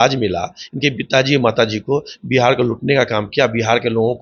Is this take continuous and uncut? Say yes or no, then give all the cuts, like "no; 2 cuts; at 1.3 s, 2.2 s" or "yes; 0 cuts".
yes; 0 cuts